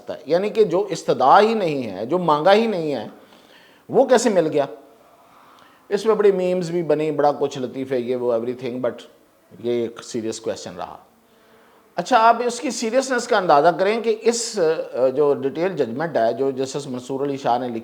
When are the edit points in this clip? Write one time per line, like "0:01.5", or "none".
none